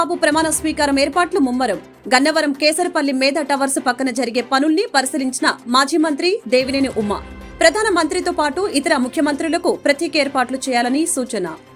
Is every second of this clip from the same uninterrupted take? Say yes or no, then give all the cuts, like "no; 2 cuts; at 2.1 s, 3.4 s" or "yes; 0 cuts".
yes; 0 cuts